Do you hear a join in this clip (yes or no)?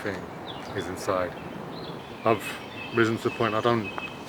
yes